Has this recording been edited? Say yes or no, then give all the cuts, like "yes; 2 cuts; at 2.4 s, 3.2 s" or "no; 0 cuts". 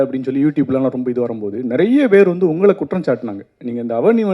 no; 0 cuts